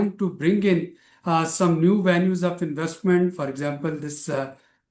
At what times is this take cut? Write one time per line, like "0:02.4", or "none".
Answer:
none